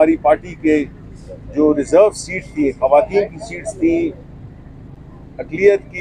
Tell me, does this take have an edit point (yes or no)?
no